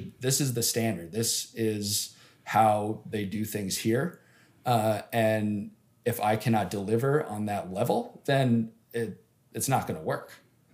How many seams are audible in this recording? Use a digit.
0